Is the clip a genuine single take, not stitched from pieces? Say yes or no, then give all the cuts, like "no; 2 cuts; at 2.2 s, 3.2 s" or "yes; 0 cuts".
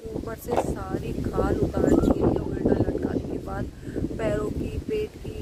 yes; 0 cuts